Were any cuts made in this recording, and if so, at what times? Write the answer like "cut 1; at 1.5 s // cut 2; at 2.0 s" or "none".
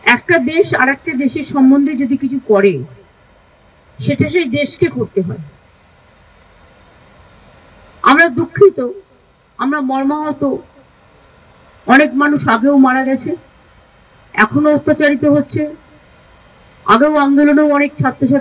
none